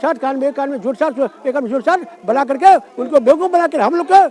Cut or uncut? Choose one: uncut